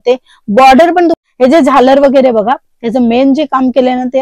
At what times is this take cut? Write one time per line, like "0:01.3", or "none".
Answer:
0:01.1

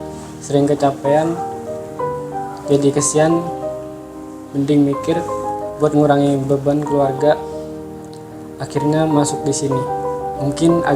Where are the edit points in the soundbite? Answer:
0:09.9

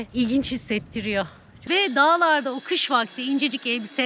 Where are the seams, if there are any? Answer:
0:01.5

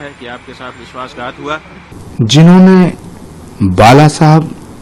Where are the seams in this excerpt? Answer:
0:01.9

